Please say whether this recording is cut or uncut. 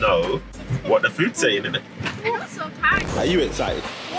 uncut